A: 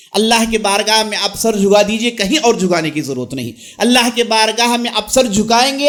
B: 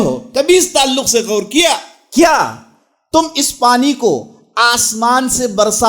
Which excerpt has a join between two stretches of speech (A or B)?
B